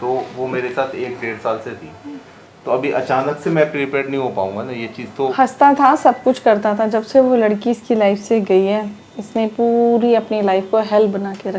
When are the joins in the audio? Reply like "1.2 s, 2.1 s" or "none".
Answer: 5.3 s